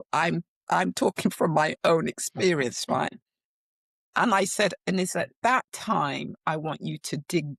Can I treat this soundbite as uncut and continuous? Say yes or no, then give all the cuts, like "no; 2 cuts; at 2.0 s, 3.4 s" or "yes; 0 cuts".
yes; 0 cuts